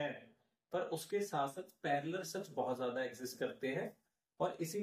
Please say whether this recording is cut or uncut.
uncut